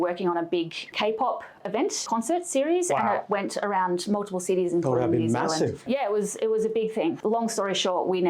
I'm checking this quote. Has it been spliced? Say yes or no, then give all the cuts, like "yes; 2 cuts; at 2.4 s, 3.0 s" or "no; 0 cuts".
yes; 3 cuts; at 2.0 s, 5.8 s, 7.2 s